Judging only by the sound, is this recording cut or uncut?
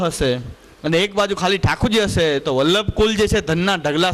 uncut